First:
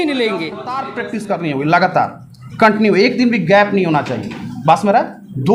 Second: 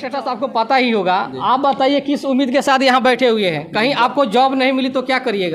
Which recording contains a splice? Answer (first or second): first